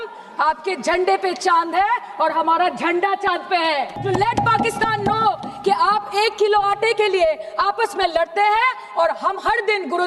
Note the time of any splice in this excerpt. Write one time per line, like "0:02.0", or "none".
0:03.9